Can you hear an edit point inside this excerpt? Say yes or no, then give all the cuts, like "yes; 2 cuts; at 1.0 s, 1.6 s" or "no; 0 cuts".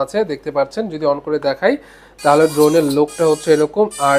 no; 0 cuts